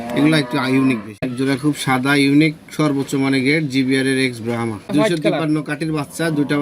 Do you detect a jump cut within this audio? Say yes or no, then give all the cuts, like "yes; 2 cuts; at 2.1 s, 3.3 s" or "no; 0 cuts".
yes; 2 cuts; at 1.3 s, 4.9 s